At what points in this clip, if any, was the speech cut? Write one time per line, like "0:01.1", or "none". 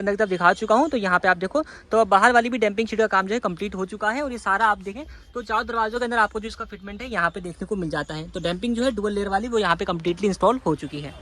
none